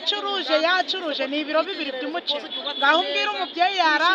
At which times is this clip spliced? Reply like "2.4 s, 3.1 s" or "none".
none